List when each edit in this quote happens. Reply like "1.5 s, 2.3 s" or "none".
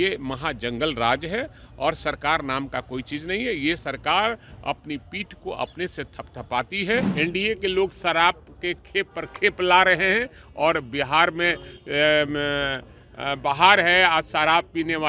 7.1 s